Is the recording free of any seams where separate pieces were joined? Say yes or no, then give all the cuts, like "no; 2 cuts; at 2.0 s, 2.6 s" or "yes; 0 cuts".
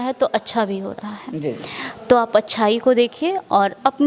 yes; 0 cuts